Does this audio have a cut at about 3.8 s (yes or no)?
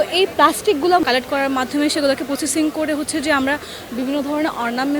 no